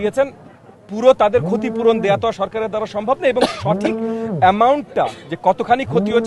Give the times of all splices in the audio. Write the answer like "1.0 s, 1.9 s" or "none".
none

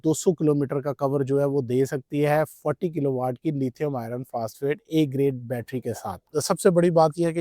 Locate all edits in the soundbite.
6.2 s

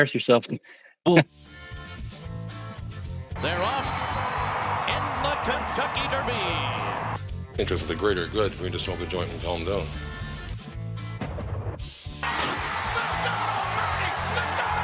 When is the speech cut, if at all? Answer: 1.2 s

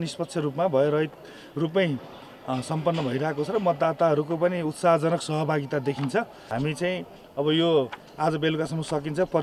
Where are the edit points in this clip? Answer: 6.4 s

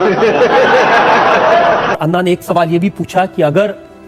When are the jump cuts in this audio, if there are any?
2.0 s

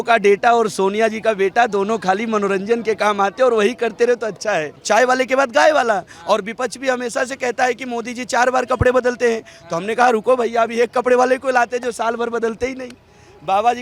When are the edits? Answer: 4.8 s

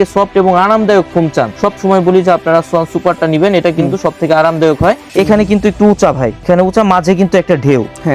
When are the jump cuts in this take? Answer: 1.5 s, 5.1 s, 6.5 s

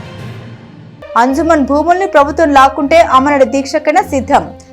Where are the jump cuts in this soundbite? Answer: 0.9 s

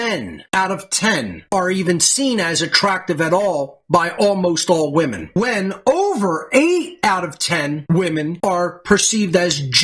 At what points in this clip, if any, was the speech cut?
none

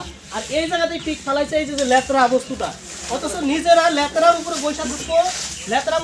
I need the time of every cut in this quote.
none

